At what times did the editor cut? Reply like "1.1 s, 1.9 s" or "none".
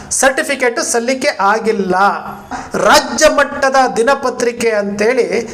2.6 s